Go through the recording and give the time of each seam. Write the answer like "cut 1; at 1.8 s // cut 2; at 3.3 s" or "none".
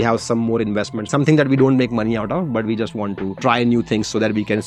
none

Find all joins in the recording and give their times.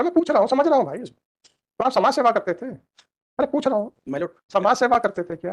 none

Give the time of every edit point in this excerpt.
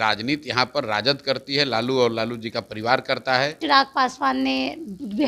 cut 1; at 3.6 s

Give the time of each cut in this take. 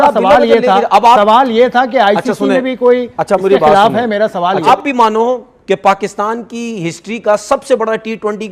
cut 1; at 4.7 s

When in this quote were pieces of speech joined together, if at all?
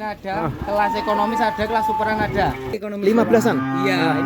cut 1; at 2.9 s

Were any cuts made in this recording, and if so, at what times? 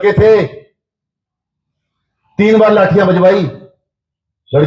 none

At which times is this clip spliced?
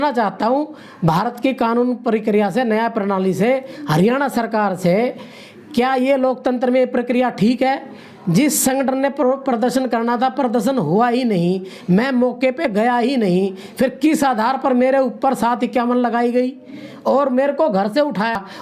none

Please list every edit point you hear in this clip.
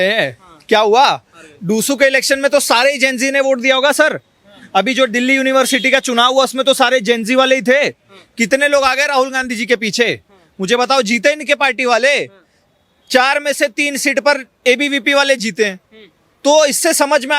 none

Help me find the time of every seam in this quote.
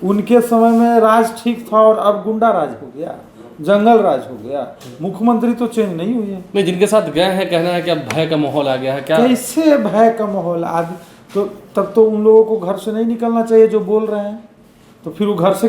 none

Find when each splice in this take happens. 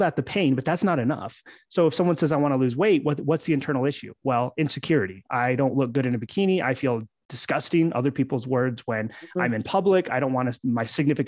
none

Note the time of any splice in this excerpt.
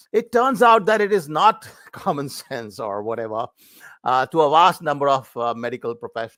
none

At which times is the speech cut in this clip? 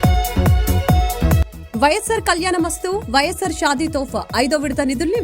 cut 1; at 1.3 s

